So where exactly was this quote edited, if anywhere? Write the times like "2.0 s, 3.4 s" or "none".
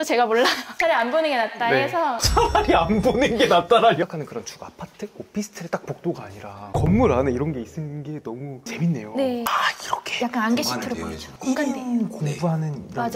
4.0 s, 9.5 s